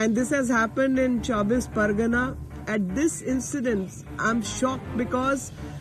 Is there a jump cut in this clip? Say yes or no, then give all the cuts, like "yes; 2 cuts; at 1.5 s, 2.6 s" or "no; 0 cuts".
no; 0 cuts